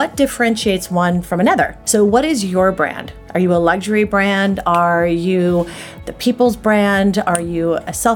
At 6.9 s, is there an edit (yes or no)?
no